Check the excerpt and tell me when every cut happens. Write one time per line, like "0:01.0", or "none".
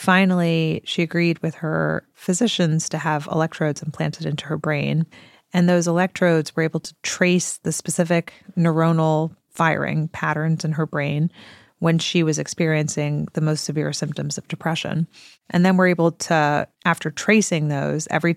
none